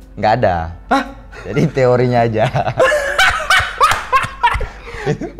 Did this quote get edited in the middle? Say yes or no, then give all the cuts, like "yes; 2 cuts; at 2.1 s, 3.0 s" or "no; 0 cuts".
no; 0 cuts